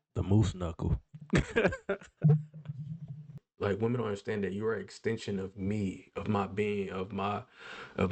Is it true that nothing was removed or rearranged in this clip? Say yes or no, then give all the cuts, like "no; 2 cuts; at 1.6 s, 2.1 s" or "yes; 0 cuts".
no; 1 cut; at 3.4 s